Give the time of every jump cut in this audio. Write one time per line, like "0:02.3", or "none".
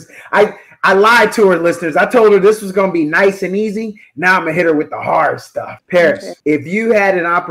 0:05.8
0:06.3